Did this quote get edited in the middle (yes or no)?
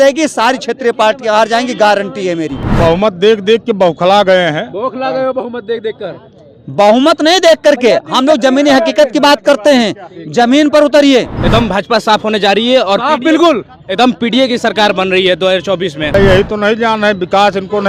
yes